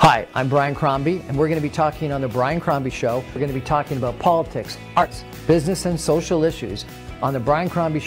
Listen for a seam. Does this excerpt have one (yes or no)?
yes